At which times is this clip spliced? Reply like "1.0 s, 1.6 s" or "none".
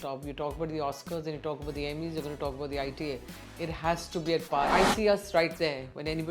4.7 s